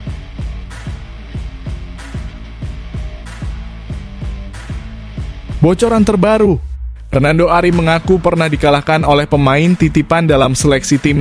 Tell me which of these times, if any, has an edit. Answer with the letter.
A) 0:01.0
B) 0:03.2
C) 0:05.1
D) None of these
D